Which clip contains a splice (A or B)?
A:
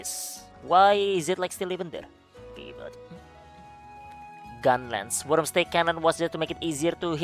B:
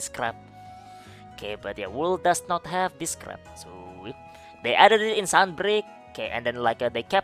A